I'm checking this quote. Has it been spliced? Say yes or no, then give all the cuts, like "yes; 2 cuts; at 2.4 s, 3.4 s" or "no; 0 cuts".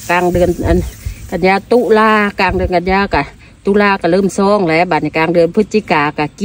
no; 0 cuts